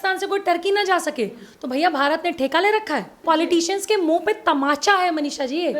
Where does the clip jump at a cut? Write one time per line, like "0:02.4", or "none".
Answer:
0:03.2

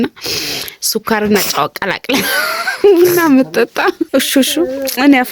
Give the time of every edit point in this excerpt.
0:04.0

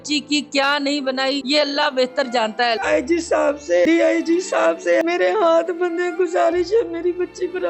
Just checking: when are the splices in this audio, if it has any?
0:01.4
0:02.8
0:03.9
0:05.0

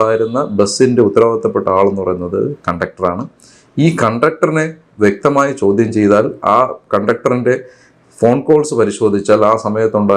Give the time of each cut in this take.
none

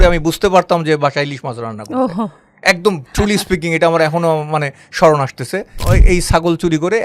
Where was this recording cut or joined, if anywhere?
0:05.8

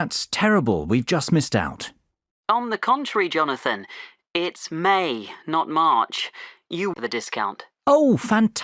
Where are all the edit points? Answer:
0:06.9

